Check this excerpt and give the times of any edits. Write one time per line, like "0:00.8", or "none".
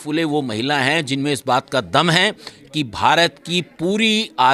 none